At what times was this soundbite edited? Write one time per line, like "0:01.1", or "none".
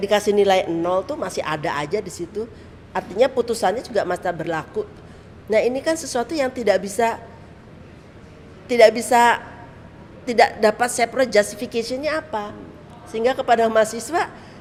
none